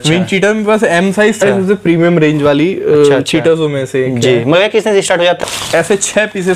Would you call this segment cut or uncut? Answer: cut